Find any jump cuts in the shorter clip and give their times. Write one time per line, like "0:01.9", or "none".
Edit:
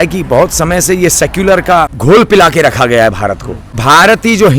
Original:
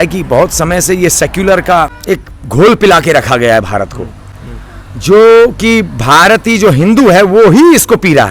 0:01.9
0:03.7